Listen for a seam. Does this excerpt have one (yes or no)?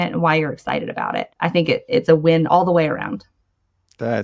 yes